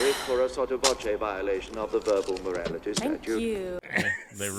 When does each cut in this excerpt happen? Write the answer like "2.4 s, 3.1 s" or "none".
none